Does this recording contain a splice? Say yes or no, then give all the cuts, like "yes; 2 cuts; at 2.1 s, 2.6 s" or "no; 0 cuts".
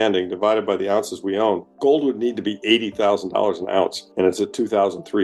yes; 1 cut; at 1.7 s